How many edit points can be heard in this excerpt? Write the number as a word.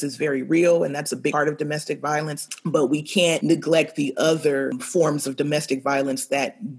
four